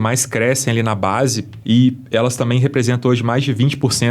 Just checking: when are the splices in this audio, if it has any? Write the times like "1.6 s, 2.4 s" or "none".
1.5 s